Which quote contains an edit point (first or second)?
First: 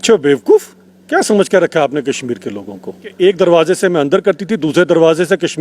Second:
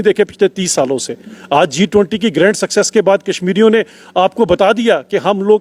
first